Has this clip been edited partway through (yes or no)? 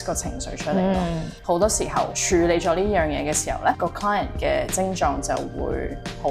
yes